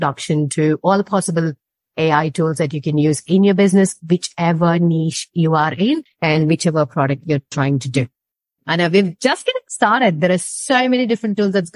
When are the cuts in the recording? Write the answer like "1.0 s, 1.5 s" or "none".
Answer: 8.5 s